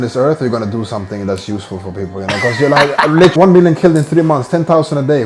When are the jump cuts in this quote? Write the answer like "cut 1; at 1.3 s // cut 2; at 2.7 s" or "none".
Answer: cut 1; at 3.3 s